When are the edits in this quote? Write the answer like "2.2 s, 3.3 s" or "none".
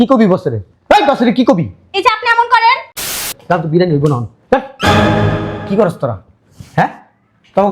3.0 s